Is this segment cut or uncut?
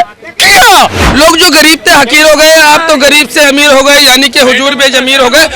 cut